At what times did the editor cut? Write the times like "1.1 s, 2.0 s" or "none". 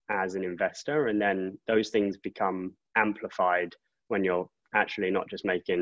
none